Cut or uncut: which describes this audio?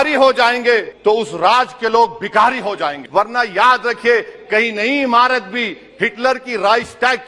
cut